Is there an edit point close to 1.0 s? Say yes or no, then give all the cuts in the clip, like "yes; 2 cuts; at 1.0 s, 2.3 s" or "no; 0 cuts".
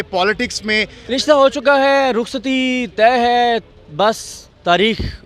yes; 1 cut; at 1.0 s